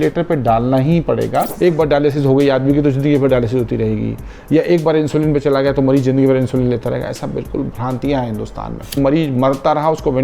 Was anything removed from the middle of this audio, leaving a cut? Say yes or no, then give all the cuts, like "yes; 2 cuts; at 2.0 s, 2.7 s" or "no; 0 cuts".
yes; 2 cuts; at 1.6 s, 9.0 s